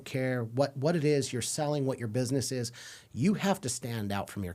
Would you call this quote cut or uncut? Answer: uncut